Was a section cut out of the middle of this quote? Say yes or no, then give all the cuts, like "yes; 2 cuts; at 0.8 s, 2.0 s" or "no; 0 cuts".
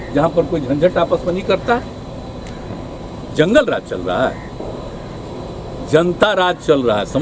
no; 0 cuts